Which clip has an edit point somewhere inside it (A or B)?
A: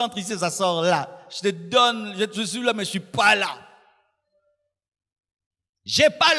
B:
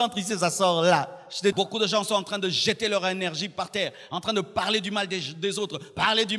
B